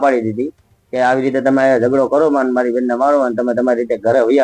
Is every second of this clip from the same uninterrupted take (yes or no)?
yes